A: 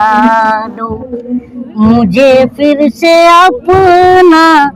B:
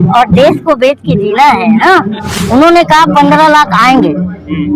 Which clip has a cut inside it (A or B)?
B